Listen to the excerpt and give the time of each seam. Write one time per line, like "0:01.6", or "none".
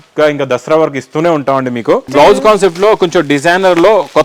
0:02.1